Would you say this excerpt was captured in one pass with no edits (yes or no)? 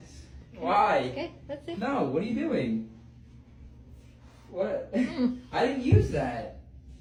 yes